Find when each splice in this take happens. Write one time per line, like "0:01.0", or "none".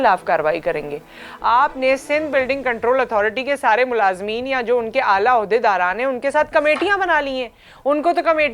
none